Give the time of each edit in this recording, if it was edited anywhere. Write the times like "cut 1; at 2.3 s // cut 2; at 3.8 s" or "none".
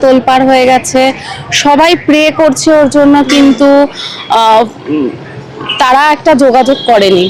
none